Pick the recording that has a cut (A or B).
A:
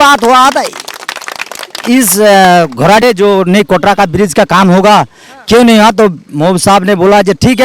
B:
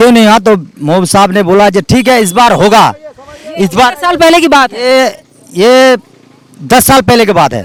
A